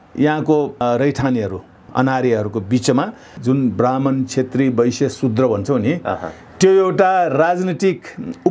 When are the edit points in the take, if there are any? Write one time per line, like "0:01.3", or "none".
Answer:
0:00.8
0:01.9
0:03.3